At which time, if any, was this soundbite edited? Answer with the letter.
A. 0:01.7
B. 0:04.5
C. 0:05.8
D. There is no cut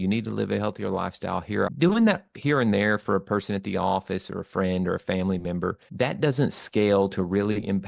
A